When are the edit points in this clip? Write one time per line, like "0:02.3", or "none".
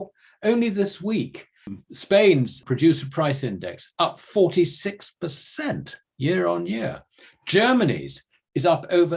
0:01.7
0:02.6